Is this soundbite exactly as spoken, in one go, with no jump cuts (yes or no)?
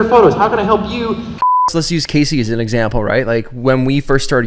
no